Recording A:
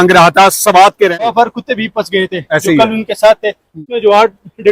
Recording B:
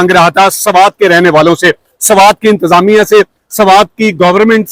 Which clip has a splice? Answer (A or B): A